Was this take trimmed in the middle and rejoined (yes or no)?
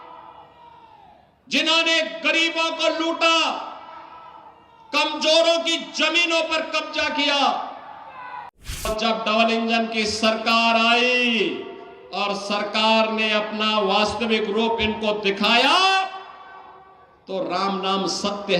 yes